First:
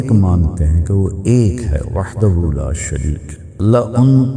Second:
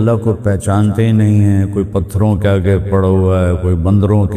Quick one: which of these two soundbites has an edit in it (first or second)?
first